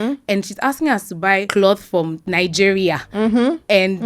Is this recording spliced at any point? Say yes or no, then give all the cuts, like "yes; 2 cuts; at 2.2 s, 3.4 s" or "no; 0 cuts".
yes; 2 cuts; at 1.5 s, 2.2 s